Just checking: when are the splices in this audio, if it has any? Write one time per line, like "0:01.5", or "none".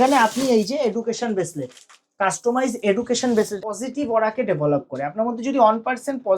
0:03.6